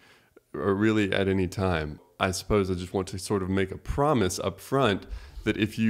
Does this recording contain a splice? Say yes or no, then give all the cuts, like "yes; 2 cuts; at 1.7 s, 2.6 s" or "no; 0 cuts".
yes; 1 cut; at 2.0 s